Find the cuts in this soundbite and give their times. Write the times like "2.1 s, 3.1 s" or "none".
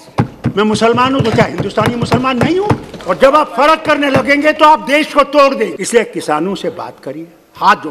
2.9 s, 5.8 s